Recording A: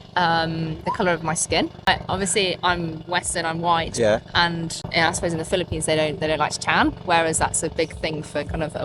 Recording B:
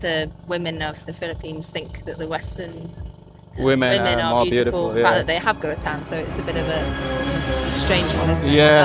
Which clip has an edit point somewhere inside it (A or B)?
A